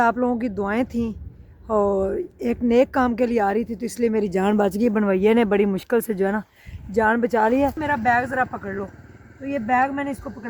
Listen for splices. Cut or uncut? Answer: cut